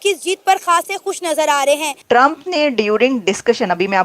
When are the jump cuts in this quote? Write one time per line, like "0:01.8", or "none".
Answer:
0:01.9